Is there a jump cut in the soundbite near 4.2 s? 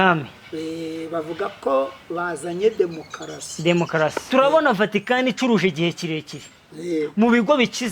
yes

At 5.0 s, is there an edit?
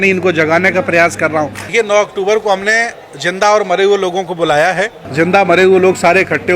yes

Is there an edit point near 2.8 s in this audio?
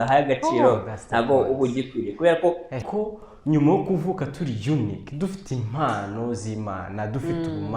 yes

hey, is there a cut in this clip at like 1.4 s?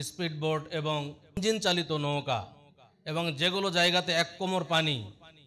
yes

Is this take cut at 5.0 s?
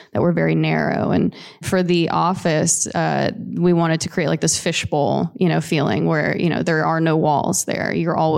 no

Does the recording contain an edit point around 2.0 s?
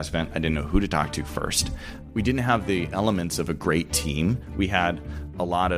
yes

